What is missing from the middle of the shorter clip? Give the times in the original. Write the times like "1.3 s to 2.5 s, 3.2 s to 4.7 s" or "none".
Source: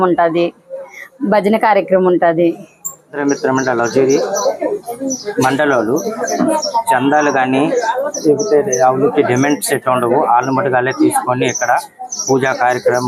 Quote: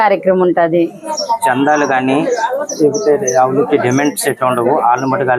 2.8 s to 6.6 s

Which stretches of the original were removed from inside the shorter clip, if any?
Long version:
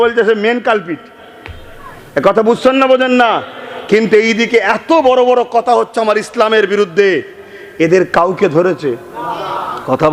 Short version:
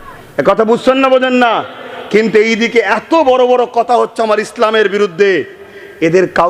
none

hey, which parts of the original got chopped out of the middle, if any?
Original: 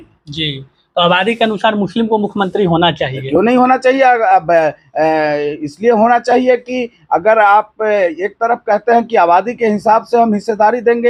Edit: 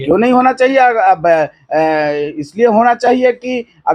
none

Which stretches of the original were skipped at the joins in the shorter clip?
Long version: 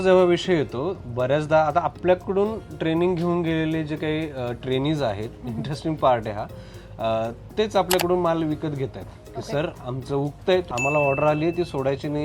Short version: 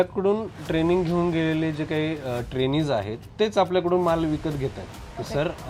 5.4 s to 7.4 s

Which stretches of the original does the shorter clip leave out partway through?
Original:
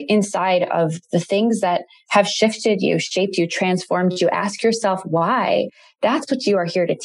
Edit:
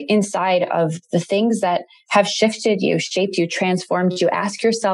none

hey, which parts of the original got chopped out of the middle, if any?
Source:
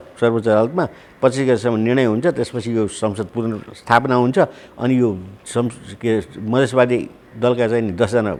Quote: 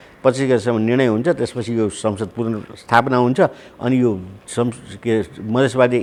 none

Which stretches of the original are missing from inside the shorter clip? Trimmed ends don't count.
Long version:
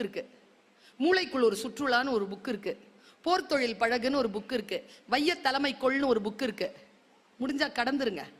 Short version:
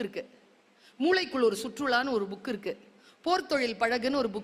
none

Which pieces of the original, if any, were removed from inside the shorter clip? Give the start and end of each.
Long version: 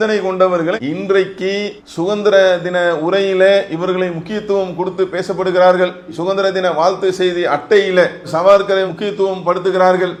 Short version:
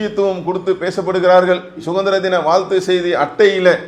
none

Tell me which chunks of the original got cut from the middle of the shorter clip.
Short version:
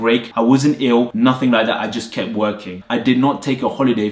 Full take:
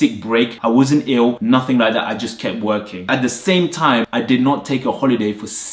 3.1 s to 4.0 s

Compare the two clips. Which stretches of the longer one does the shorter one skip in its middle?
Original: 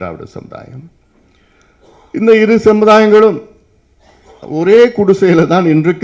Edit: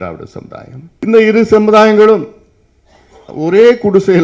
1.0 s to 2.2 s

